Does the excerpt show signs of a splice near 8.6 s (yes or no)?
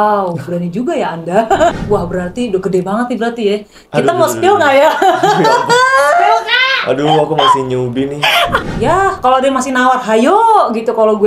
yes